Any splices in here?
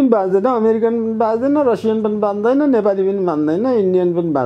no; 0 cuts

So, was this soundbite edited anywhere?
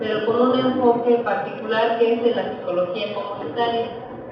no; 0 cuts

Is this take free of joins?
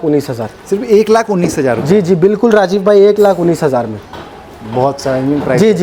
yes; 0 cuts

